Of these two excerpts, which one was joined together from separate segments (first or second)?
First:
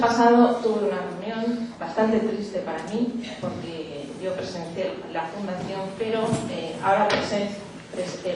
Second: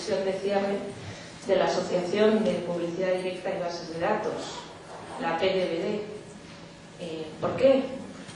first